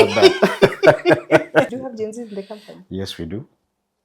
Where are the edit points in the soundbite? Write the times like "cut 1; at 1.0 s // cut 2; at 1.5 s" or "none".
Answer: cut 1; at 1.7 s